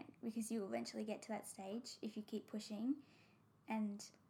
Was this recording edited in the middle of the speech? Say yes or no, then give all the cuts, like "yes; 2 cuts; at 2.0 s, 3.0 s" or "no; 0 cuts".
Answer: no; 0 cuts